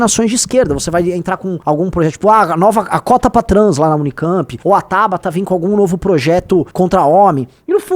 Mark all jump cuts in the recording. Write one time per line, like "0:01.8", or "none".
0:01.5
0:04.5
0:06.7